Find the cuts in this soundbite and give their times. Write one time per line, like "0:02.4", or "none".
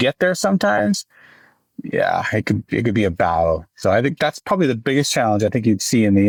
none